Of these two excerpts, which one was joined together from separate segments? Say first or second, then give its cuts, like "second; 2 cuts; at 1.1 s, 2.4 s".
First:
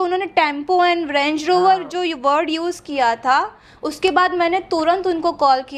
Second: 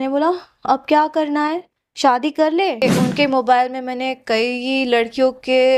second; 1 cut; at 2.8 s